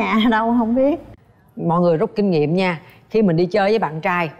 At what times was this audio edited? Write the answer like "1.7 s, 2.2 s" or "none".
1.1 s

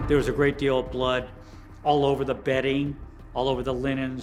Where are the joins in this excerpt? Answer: none

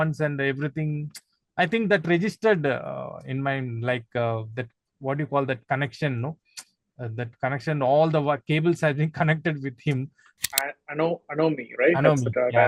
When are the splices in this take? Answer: 10.4 s

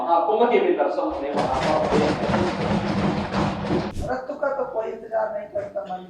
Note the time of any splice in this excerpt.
3.9 s

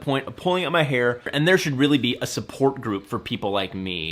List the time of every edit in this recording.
1.3 s

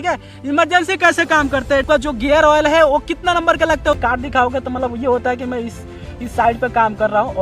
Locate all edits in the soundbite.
1.8 s, 4.0 s

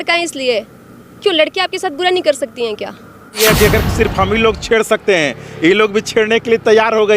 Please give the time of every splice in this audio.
3.4 s

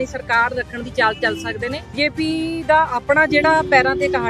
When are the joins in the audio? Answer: 1.9 s

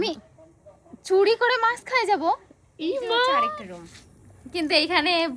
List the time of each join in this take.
3.6 s

